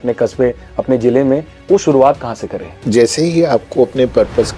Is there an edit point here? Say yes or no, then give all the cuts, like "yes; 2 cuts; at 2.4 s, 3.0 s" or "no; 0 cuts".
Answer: yes; 2 cuts; at 1.5 s, 2.7 s